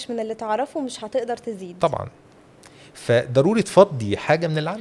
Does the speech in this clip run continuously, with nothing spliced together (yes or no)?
yes